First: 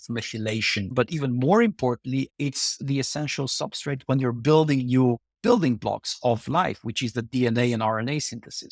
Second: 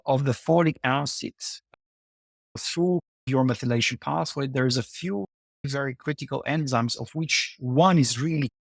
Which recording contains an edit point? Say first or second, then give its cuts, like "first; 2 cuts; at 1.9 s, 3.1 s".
first; 2 cuts; at 0.9 s, 2.3 s